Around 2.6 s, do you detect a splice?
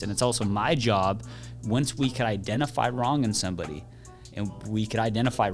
yes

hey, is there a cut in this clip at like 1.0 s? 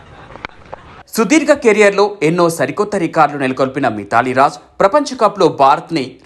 yes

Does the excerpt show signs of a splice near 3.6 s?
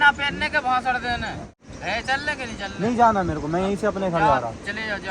no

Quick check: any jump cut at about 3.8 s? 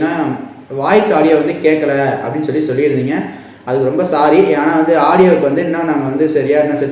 no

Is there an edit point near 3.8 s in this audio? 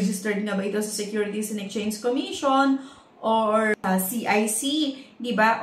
yes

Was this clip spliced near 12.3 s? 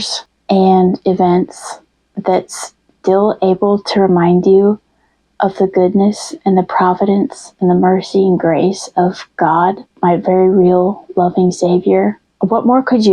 yes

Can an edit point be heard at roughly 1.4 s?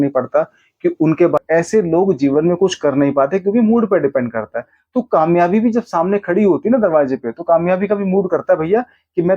yes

